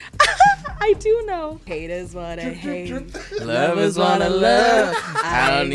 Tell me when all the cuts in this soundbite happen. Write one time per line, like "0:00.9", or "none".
0:01.6